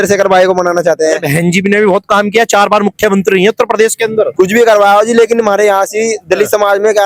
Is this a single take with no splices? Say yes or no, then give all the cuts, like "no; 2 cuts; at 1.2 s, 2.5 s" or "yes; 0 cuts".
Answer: yes; 0 cuts